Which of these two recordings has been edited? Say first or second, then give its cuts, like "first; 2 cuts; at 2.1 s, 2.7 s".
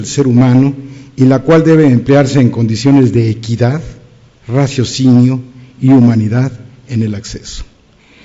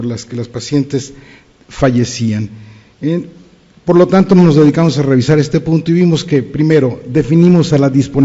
first; 1 cut; at 2.0 s